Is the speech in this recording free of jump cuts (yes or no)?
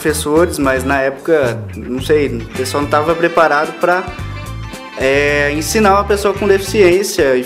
yes